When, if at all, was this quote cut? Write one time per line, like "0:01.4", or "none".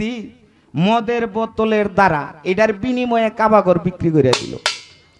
none